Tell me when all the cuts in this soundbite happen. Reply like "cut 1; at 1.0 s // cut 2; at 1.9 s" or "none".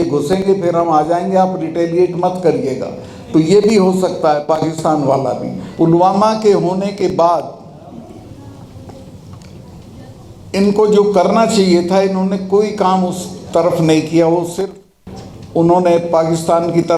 cut 1; at 5.6 s